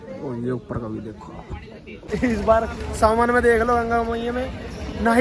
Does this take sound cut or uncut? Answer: cut